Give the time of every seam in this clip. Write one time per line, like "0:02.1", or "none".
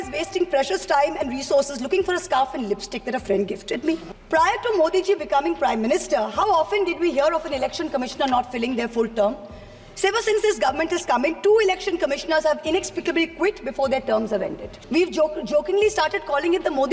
0:04.1
0:14.7